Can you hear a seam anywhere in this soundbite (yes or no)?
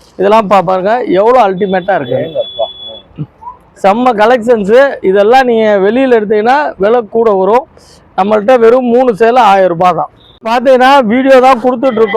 yes